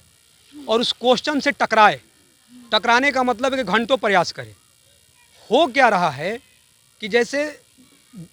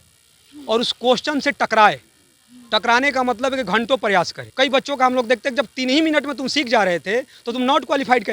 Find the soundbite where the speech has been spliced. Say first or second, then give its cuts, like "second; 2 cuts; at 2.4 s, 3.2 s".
second; 1 cut; at 4.4 s